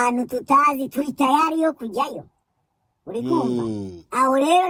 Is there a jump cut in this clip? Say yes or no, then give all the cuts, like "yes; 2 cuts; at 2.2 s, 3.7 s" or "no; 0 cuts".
no; 0 cuts